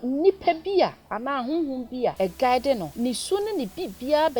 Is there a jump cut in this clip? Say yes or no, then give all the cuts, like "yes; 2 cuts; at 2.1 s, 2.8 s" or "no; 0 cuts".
yes; 2 cuts; at 2.1 s, 2.9 s